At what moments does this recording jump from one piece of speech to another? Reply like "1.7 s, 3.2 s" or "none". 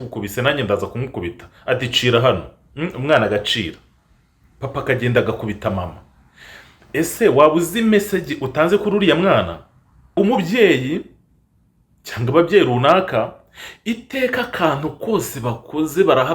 10.1 s